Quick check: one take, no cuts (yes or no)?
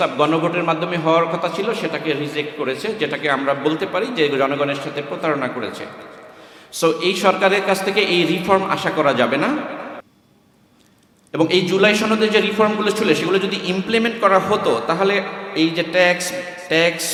yes